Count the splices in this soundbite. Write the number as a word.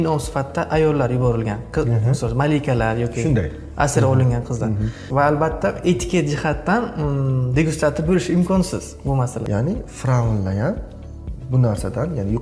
one